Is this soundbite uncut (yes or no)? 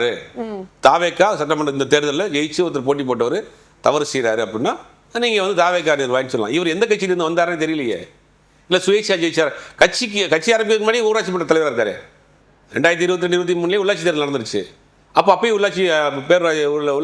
yes